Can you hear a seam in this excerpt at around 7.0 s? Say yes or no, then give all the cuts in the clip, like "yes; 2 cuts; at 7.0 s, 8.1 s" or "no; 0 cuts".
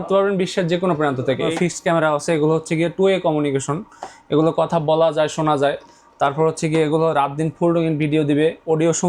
no; 1 cut; at 1.5 s